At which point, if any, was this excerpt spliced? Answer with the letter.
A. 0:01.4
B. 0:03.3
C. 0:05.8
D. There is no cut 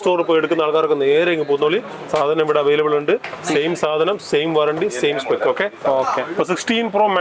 D